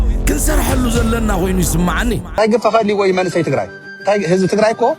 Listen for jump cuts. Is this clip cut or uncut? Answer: cut